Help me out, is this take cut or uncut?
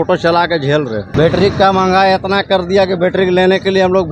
cut